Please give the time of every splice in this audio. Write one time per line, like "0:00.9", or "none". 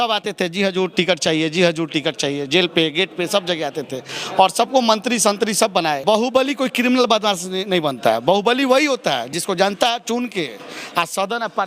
0:06.0